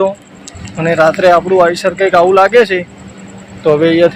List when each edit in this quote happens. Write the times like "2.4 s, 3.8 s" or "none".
none